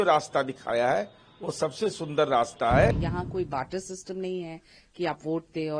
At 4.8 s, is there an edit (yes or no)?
no